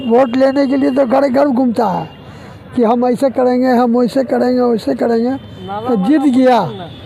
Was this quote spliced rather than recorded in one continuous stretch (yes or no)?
no